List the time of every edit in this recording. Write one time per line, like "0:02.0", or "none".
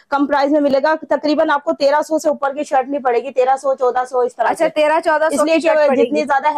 none